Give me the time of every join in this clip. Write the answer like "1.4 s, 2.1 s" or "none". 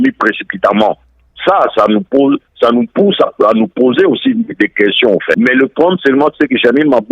5.3 s